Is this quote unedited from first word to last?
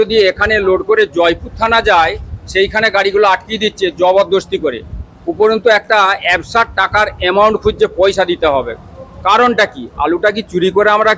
yes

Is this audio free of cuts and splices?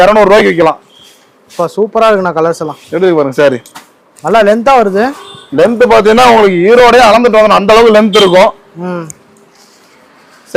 yes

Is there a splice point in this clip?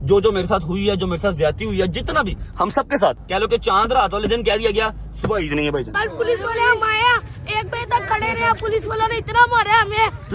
yes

